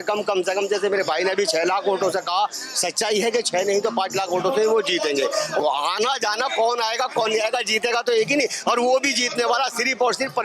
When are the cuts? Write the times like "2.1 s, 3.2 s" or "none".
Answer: 5.6 s